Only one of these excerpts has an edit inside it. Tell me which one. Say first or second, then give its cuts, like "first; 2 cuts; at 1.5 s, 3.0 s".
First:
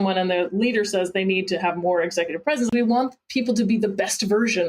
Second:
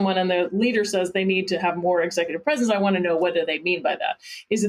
first; 1 cut; at 2.7 s